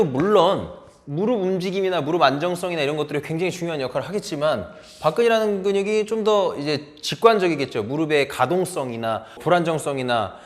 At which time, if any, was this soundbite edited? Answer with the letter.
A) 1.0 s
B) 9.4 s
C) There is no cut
B